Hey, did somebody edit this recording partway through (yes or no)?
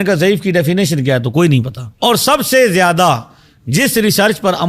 yes